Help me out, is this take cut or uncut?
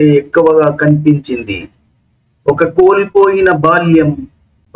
uncut